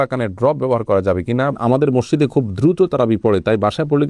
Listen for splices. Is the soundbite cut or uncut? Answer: cut